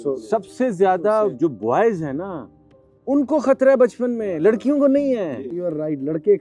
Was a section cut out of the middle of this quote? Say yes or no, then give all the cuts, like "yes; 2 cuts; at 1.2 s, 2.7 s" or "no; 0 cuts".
yes; 1 cut; at 5.5 s